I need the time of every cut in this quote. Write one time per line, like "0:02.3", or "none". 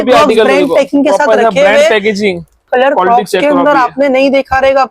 0:02.7